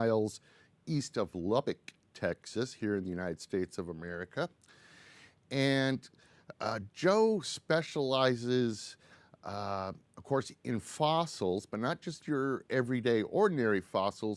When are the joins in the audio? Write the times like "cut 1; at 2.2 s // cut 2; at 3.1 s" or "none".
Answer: cut 1; at 11.3 s